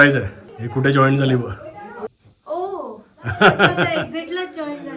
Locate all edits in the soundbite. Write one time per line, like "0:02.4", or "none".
none